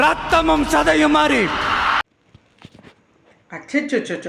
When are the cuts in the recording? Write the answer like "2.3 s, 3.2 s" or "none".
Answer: 2.1 s